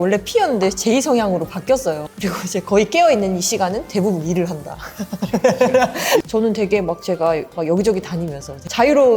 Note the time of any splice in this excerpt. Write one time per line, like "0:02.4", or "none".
0:02.1
0:06.2